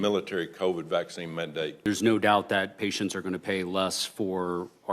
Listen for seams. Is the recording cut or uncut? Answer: cut